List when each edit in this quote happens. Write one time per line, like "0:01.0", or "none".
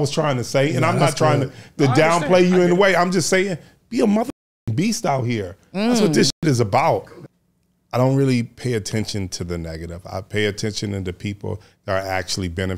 0:07.2